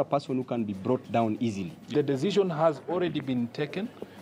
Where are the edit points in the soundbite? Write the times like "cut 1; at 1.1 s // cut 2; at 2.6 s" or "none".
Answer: cut 1; at 1.9 s